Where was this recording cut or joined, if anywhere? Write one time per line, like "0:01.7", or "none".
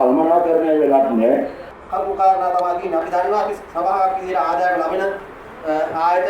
0:01.8

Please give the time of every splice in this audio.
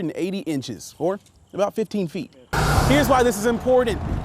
0:02.5

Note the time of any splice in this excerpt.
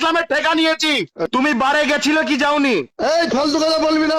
0:01.2

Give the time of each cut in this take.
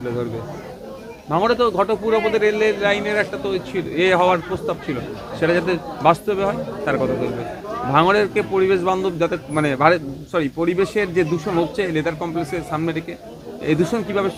none

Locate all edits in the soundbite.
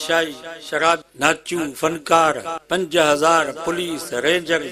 0:01.1
0:02.5

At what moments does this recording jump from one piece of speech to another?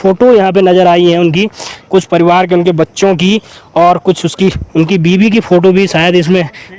none

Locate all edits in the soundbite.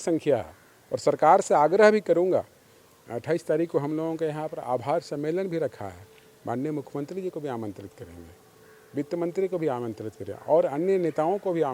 none

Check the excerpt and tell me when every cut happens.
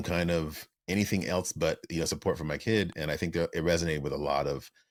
none

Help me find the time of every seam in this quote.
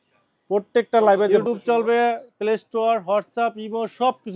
0:01.3

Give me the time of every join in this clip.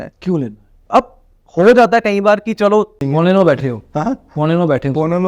0:03.0

